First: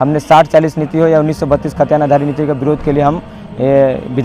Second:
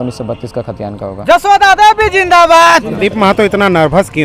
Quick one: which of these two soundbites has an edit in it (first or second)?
second